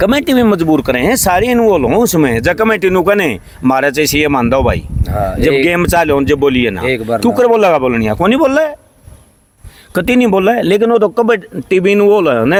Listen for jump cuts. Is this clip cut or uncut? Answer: uncut